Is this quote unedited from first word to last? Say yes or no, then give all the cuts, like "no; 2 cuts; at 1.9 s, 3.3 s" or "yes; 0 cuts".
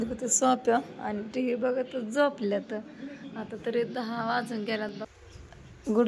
no; 1 cut; at 5.1 s